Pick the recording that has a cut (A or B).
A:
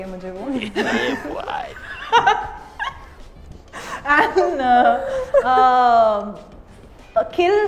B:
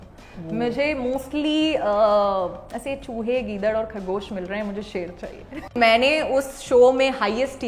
B